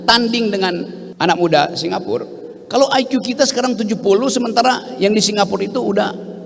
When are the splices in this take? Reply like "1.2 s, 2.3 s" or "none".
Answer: 1.0 s